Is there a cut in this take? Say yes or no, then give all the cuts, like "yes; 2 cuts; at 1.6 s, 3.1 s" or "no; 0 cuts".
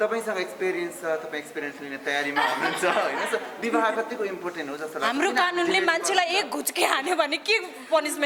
no; 0 cuts